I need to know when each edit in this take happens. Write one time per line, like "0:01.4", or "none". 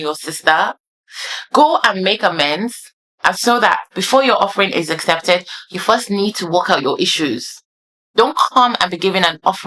none